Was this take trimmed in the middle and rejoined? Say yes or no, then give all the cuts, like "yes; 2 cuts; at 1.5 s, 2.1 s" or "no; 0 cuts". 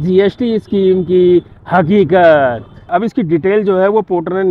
yes; 1 cut; at 2.8 s